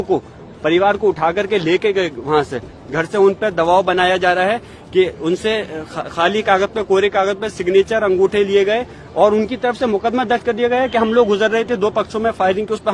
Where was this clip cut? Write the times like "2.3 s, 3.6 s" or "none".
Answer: none